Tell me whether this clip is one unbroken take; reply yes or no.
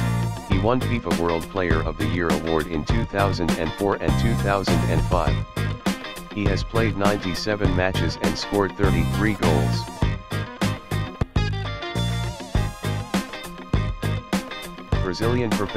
yes